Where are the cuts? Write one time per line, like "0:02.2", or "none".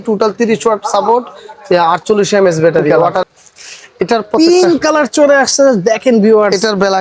0:03.2